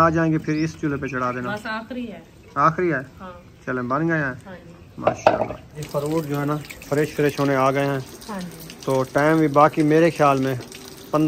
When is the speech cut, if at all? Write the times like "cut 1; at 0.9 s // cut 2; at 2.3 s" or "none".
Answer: cut 1; at 5.8 s